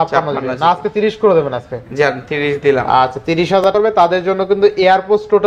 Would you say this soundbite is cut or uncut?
cut